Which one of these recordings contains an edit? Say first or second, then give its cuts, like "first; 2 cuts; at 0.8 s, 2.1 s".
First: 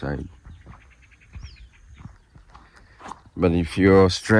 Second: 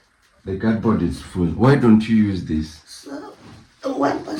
first; 1 cut; at 2.3 s